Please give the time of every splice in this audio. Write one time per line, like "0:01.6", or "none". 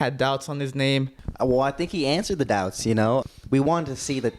0:01.2
0:03.2